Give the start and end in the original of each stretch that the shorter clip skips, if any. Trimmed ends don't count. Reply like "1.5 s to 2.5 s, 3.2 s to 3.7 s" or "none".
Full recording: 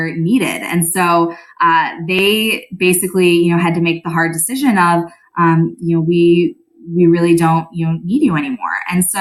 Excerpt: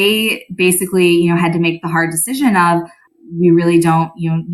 5.3 s to 6.6 s